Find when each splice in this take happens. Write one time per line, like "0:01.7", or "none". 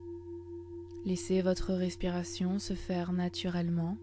0:01.0